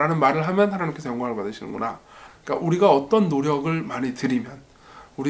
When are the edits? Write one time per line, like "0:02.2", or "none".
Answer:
0:02.3